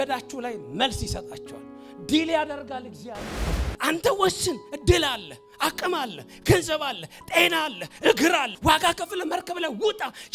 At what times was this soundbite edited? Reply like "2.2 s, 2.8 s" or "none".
3.6 s, 8.5 s

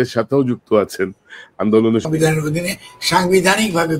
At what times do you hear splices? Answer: 2.1 s

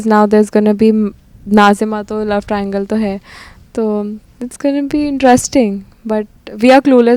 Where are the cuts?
none

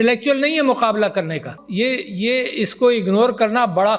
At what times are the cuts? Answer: 1.6 s

